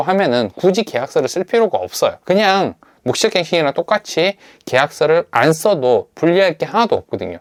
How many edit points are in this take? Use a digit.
0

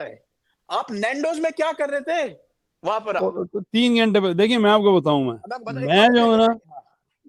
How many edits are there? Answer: 0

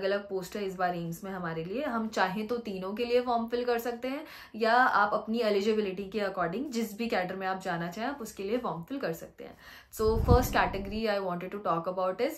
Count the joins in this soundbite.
0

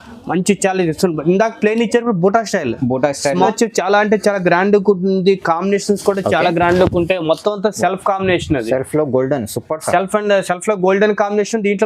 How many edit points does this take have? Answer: 1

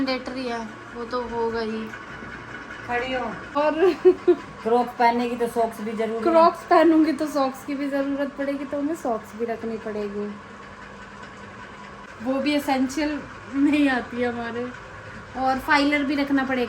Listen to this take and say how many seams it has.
2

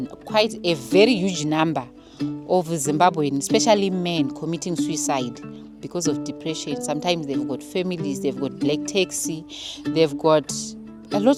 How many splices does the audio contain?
0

